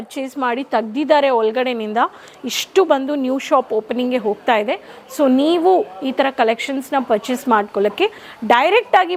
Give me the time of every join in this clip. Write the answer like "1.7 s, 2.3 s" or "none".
none